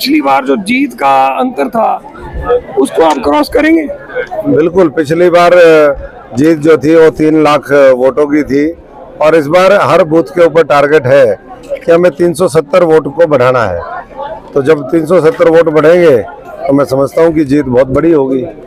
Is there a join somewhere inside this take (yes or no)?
no